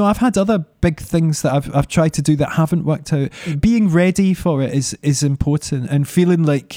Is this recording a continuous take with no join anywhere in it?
no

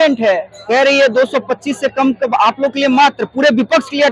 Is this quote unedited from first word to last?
yes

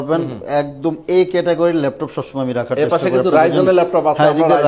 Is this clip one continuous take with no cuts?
yes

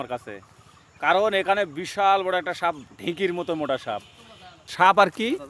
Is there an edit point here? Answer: yes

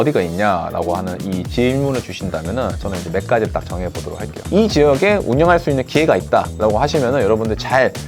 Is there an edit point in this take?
yes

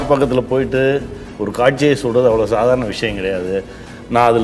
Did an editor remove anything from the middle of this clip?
no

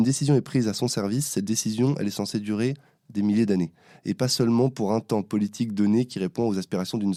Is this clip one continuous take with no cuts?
yes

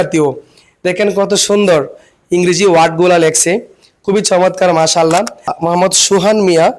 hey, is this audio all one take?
no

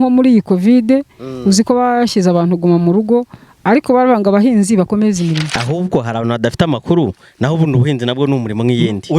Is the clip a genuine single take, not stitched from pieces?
no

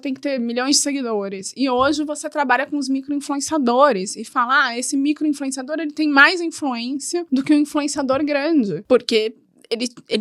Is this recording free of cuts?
no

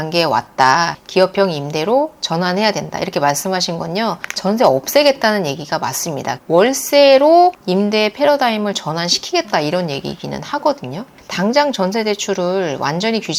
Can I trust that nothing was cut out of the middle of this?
no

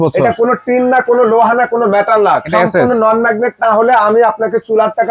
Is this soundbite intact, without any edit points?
yes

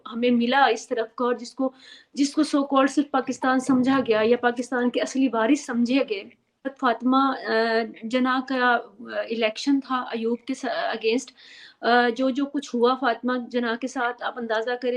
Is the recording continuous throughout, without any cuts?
no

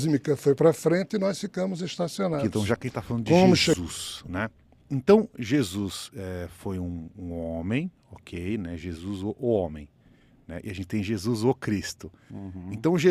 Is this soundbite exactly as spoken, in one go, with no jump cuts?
no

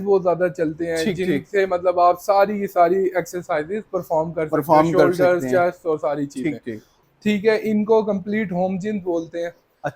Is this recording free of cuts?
no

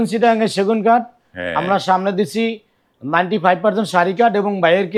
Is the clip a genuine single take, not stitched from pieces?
yes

